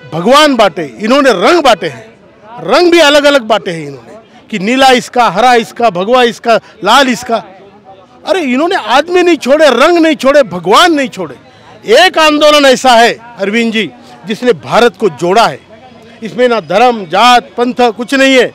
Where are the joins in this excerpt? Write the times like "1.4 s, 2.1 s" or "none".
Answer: none